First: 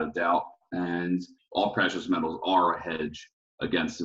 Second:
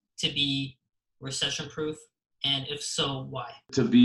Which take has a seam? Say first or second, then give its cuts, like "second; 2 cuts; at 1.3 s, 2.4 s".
first; 1 cut; at 1.3 s